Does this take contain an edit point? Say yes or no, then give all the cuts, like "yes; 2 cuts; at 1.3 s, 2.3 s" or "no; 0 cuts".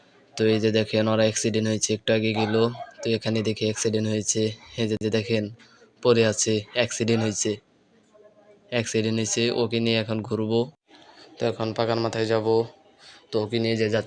no; 0 cuts